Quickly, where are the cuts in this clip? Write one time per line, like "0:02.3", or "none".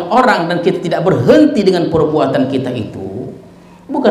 none